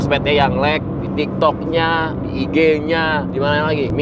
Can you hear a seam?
no; 0 cuts

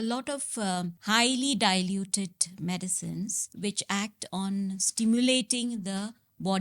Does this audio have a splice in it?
no; 0 cuts

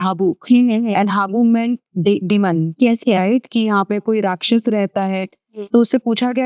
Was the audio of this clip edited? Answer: no; 0 cuts

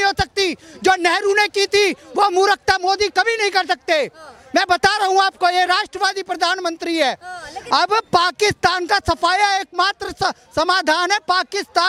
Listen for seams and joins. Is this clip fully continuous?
yes; 0 cuts

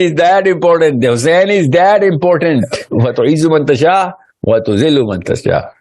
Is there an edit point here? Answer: yes; 1 cut; at 2.8 s

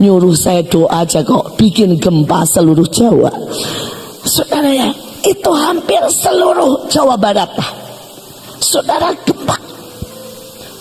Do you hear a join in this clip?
no; 0 cuts

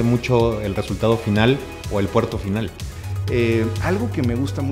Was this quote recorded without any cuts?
no; 1 cut; at 2.9 s

